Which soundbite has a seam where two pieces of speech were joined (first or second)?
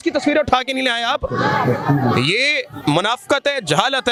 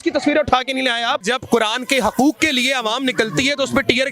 second